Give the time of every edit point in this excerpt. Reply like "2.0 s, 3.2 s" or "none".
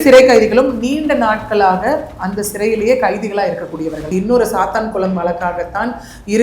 4.0 s